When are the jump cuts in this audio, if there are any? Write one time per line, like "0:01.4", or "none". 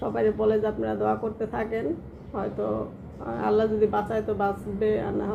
none